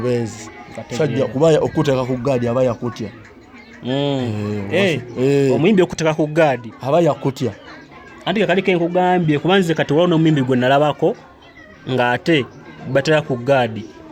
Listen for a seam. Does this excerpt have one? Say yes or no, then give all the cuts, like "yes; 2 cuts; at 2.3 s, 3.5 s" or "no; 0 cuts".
no; 0 cuts